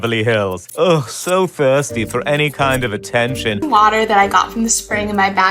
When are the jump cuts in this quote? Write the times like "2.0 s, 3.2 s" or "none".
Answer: 3.6 s

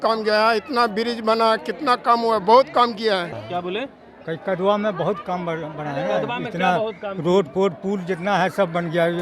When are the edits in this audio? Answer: 3.4 s

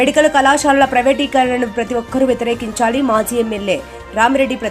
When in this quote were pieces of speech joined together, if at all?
none

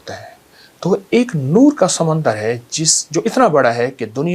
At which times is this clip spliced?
none

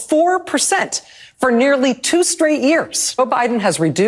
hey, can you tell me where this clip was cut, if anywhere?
3.2 s

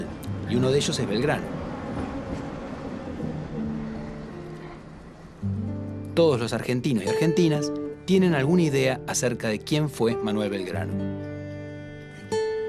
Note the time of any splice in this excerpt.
none

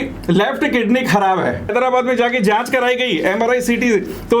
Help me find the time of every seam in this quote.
1.7 s

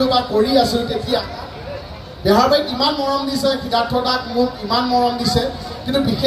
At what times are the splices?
1.2 s

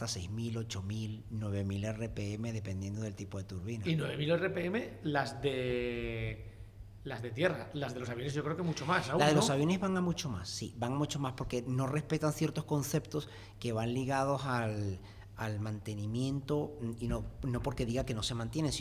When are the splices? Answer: none

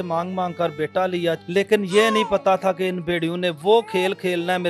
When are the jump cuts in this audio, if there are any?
1.4 s, 3.6 s

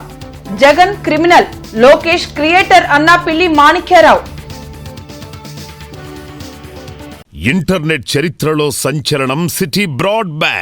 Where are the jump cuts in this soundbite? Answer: 7.2 s

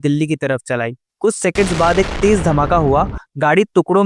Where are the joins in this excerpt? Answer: 1.0 s

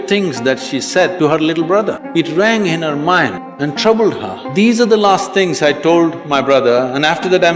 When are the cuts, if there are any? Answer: 1.1 s, 2.0 s, 3.4 s, 4.3 s

